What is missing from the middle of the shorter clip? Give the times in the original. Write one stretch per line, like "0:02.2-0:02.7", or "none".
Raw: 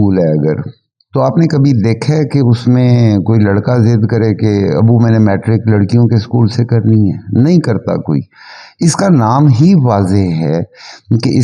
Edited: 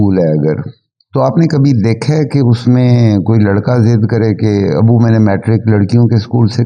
none